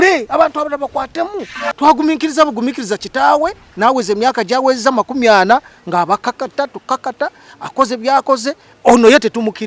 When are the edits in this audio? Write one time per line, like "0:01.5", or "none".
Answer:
0:01.5